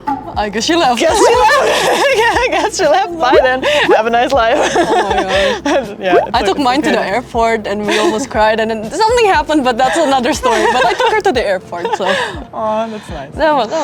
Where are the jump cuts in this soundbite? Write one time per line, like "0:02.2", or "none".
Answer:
none